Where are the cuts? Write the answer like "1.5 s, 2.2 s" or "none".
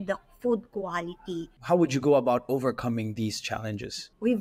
1.5 s